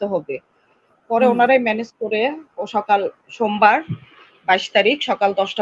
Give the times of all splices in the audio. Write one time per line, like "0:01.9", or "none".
none

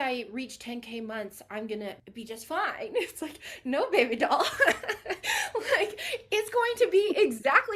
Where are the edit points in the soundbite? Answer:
0:02.1

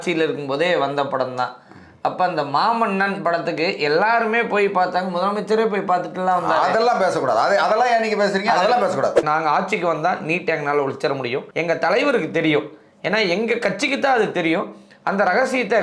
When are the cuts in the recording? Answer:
0:09.2

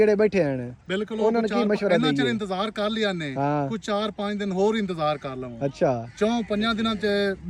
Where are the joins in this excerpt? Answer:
none

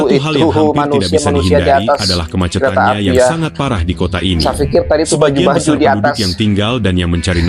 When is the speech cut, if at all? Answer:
none

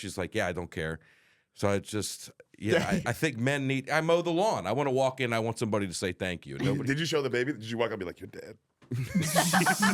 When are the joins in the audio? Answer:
0:06.8

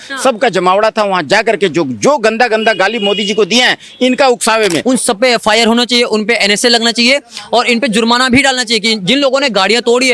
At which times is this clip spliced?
0:04.8

